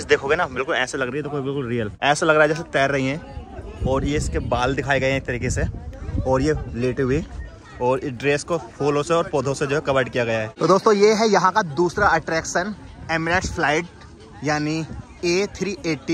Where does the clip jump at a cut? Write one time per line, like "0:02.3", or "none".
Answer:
0:01.9
0:10.5